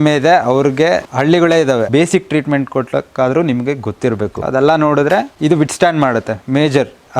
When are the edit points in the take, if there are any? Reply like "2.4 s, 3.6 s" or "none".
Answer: 1.1 s, 1.9 s, 4.4 s, 5.3 s, 6.4 s